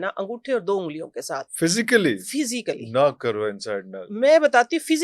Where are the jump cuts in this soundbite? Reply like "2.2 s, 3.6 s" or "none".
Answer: none